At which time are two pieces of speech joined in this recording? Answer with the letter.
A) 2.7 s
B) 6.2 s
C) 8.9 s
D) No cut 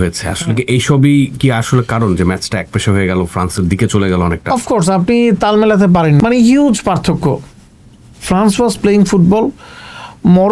B